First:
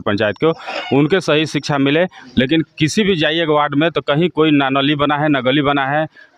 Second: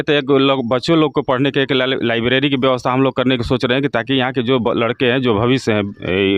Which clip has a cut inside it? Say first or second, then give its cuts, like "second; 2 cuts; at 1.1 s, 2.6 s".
first; 1 cut; at 2.2 s